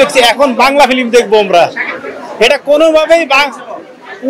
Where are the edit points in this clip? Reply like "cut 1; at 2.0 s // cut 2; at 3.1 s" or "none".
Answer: none